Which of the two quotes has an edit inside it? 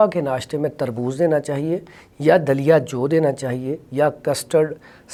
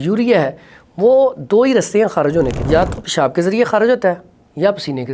second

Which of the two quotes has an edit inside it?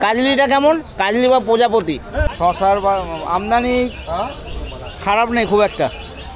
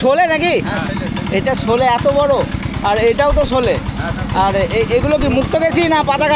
first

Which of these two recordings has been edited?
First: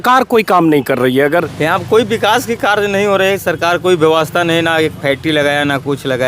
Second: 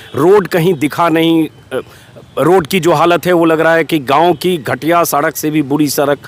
first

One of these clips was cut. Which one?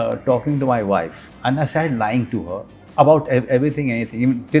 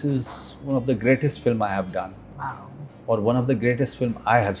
first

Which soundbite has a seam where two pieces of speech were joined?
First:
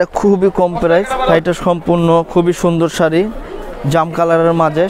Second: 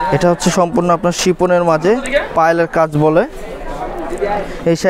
first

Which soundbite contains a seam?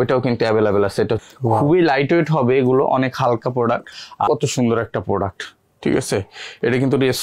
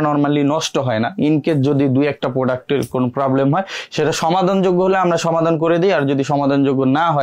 first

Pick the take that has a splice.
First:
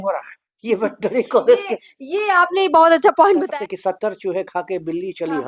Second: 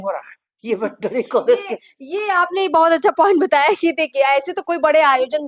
first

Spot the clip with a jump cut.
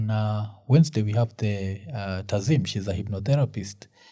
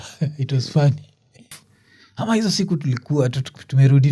second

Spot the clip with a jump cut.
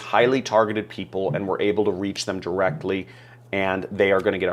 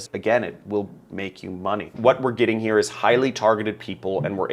second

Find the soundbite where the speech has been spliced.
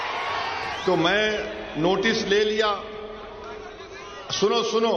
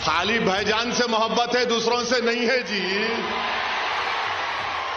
second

